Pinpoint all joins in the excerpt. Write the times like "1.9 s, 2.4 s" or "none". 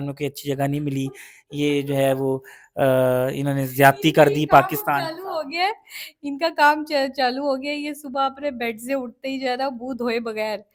none